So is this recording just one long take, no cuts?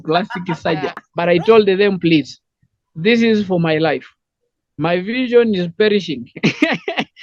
no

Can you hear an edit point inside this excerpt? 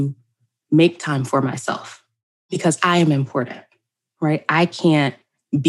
yes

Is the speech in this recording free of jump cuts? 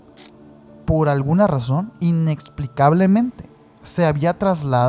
yes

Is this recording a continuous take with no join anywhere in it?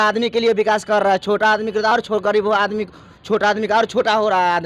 yes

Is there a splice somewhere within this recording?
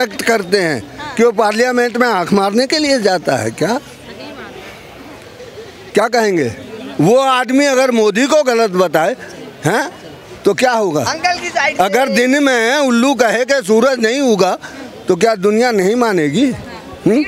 no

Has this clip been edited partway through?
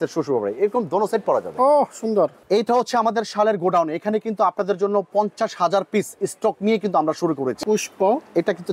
yes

